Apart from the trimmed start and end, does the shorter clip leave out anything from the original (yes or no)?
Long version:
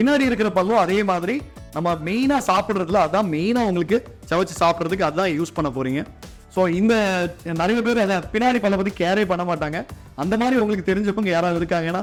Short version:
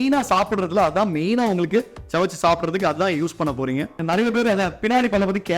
yes